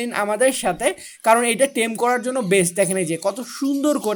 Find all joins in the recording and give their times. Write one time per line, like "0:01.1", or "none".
none